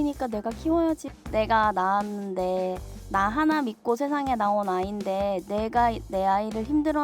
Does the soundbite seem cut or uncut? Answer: cut